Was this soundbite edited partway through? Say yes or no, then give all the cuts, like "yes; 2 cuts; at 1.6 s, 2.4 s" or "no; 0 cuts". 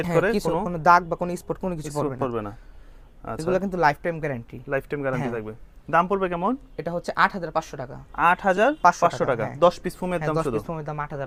no; 0 cuts